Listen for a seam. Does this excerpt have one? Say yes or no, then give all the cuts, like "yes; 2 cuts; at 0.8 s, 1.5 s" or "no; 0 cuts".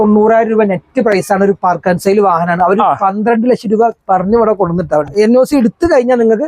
yes; 1 cut; at 5.1 s